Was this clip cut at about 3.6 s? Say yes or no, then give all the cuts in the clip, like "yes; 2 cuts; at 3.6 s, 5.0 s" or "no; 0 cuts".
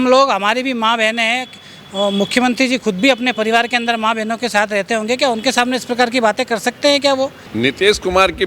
no; 1 cut; at 7.4 s